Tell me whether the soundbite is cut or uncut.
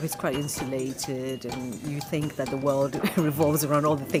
uncut